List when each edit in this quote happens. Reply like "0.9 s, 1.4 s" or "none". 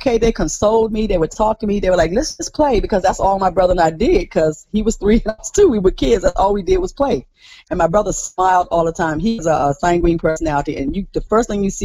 none